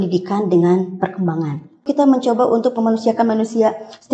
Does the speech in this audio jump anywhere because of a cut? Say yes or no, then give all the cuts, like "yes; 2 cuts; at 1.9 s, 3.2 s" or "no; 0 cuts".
yes; 1 cut; at 1.9 s